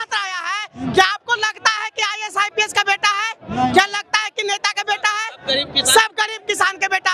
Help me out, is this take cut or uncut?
uncut